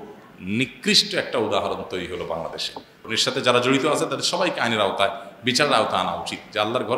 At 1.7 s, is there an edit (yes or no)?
no